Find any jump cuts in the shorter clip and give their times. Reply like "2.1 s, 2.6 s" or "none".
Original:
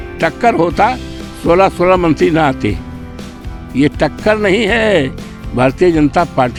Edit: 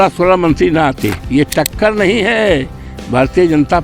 1.2 s